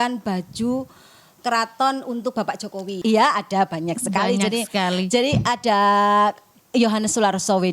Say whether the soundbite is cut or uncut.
cut